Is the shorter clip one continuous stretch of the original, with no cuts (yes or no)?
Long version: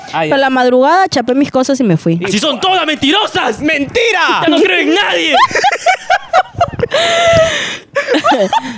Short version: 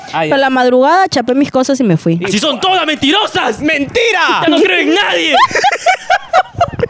yes